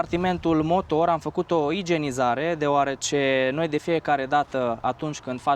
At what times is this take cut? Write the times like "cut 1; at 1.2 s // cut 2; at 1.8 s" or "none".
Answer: none